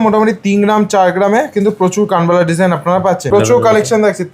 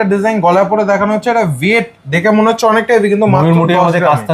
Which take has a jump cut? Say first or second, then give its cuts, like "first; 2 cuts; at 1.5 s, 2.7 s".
first; 1 cut; at 3.3 s